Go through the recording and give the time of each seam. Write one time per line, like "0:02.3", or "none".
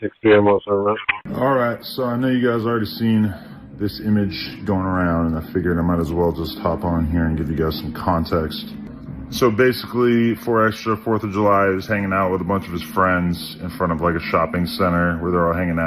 0:01.1